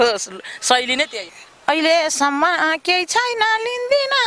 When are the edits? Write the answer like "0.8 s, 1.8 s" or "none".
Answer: 1.3 s

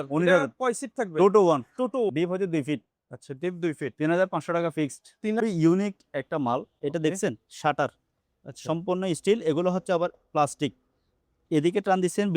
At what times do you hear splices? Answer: 2.1 s, 5.4 s

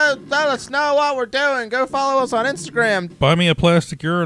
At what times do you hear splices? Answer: 3.1 s

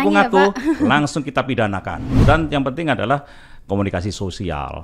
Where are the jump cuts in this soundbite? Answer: 2.0 s

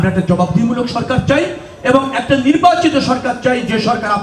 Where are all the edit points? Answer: none

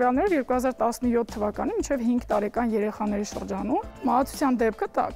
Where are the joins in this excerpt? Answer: 3.9 s

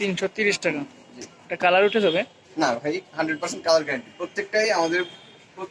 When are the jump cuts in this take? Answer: none

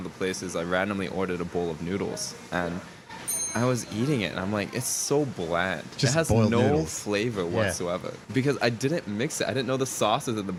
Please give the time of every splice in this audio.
none

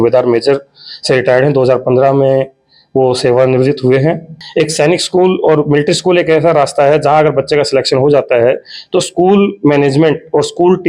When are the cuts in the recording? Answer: 4.4 s

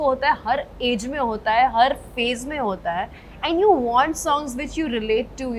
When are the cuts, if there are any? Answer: none

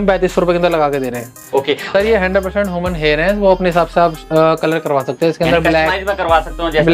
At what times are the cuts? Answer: 1.9 s

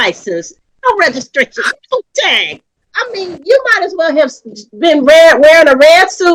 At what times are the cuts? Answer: none

